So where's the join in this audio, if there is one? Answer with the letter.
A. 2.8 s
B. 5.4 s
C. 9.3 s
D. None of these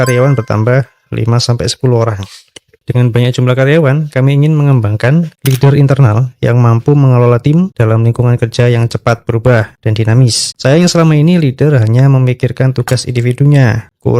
B